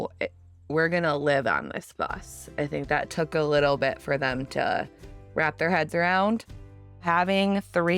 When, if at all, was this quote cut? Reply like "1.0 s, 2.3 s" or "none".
7.0 s